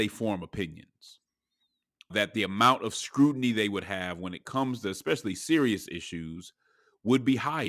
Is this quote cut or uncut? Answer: cut